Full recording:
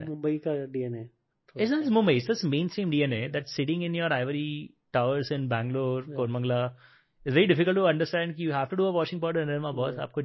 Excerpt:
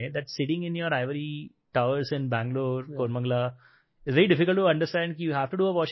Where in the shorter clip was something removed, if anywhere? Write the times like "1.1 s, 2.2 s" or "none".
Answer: none